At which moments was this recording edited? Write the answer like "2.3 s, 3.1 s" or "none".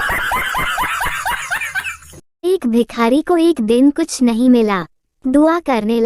2.0 s